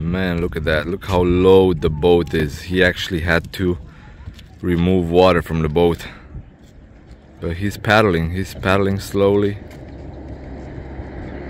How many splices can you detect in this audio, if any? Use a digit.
0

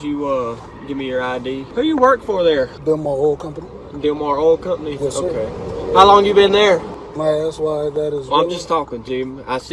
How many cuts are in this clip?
3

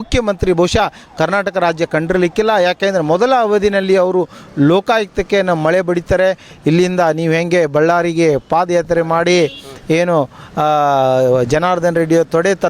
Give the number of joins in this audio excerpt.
1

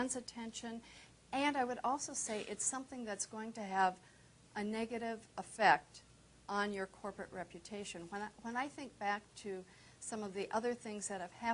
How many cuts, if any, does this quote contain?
1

